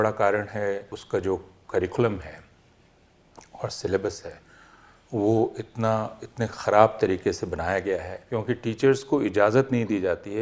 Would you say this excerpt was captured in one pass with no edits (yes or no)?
no